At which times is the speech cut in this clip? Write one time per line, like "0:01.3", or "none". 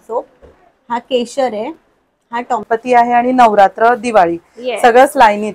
0:02.6